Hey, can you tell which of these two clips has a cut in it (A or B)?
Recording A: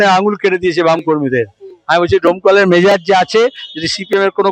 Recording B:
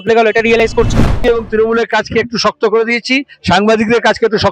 B